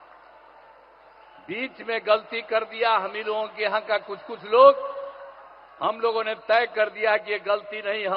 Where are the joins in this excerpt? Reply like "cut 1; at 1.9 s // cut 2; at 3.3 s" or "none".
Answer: none